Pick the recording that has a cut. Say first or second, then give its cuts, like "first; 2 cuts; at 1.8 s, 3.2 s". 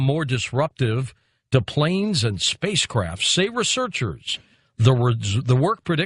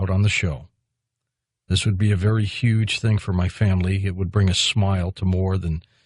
second; 1 cut; at 3.5 s